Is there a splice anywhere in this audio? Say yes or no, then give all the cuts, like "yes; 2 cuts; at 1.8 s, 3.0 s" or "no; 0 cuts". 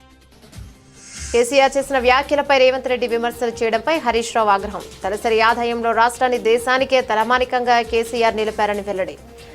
no; 0 cuts